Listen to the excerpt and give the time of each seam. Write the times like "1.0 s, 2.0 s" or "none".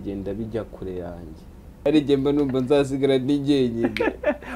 1.8 s